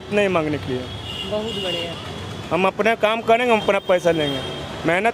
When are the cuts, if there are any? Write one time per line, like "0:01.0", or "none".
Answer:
none